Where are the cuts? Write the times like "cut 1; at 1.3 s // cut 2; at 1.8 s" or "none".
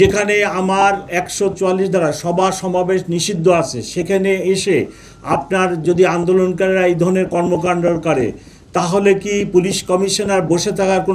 none